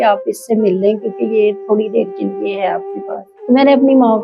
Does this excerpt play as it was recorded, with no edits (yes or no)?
no